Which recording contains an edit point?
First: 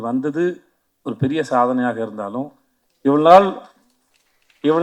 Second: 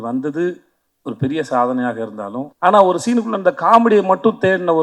second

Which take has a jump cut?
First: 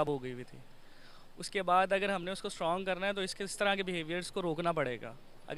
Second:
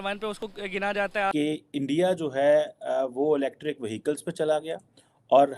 second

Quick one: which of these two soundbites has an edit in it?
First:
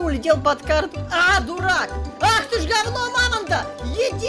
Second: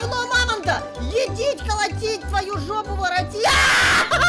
first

